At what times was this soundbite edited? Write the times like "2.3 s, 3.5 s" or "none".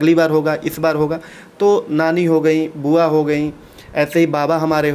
none